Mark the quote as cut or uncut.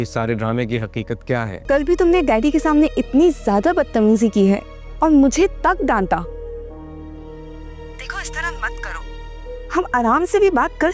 cut